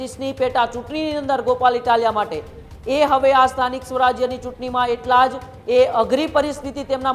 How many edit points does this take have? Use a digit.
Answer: 0